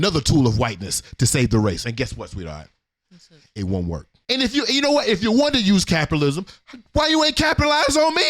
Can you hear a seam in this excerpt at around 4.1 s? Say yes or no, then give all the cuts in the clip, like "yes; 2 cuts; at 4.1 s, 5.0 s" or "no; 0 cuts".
yes; 1 cut; at 4.1 s